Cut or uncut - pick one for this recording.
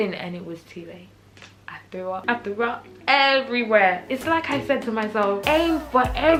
uncut